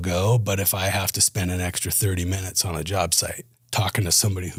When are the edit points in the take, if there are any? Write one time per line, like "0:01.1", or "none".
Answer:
none